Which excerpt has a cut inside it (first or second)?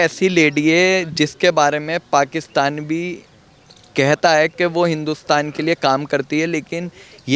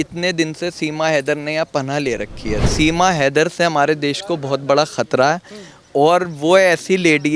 second